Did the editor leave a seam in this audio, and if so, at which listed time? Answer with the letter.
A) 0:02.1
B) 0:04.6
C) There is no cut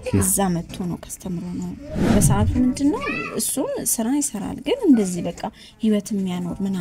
A